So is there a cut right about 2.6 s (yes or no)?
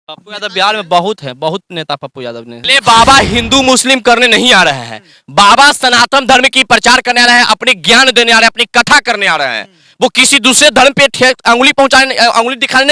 yes